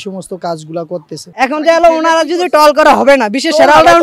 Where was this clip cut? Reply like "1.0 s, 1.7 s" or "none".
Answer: 1.3 s